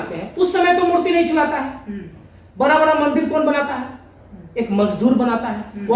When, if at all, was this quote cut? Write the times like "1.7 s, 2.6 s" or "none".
none